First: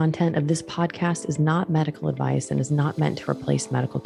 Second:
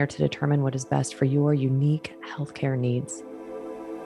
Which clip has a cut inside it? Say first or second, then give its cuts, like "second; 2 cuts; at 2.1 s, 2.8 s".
second; 1 cut; at 3.2 s